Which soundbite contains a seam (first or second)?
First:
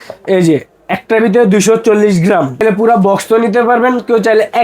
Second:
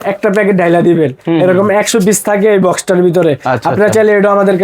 first